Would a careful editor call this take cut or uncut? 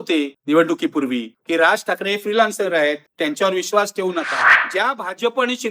cut